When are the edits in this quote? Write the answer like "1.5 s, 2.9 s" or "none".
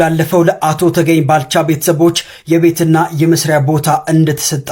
none